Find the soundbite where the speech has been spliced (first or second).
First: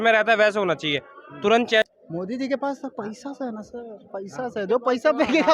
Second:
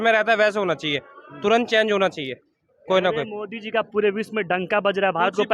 first